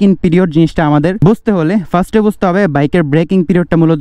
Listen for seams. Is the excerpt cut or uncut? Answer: cut